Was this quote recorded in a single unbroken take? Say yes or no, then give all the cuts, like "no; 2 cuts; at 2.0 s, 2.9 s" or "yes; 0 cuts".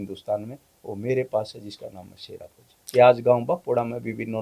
no; 1 cut; at 2.8 s